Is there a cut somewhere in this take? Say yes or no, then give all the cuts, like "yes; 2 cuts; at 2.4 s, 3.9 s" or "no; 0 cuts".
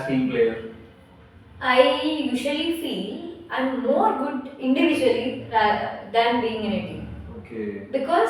no; 0 cuts